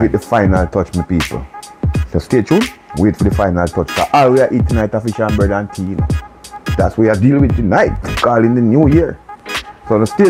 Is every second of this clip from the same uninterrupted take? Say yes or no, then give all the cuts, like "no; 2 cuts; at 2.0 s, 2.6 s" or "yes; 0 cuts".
yes; 0 cuts